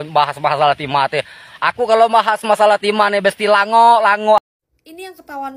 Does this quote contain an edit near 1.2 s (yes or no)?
no